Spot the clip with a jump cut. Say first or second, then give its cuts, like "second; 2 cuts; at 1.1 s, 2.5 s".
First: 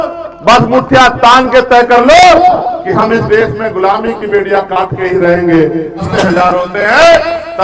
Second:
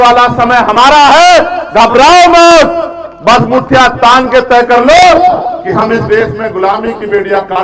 first; 1 cut; at 6.0 s